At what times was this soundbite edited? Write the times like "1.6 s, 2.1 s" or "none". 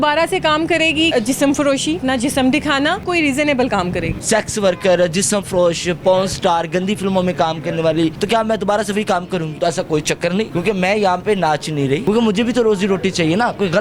1.1 s, 2.0 s, 3.0 s, 4.1 s, 8.2 s, 9.5 s, 10.5 s, 12.0 s